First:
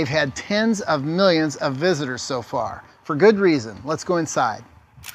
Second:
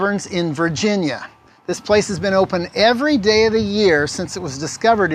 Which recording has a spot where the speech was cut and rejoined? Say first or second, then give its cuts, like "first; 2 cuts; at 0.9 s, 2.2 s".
second; 1 cut; at 3.9 s